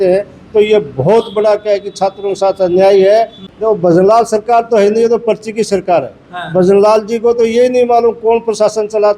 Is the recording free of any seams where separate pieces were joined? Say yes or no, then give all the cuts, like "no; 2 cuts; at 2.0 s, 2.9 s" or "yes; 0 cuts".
no; 1 cut; at 3.4 s